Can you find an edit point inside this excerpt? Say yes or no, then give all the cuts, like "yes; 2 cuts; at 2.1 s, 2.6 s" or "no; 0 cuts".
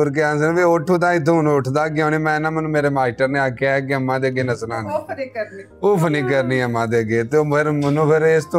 no; 0 cuts